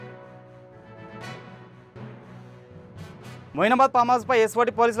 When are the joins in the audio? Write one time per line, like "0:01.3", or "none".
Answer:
0:00.9